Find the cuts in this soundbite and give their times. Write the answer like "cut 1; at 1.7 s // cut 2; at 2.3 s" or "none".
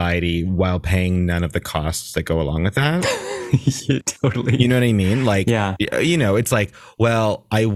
cut 1; at 5.7 s